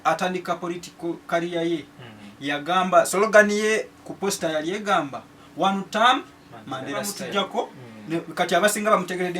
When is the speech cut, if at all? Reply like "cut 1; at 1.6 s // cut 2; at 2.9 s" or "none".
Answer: cut 1; at 7.3 s

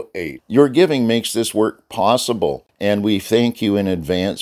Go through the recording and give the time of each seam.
cut 1; at 2.7 s

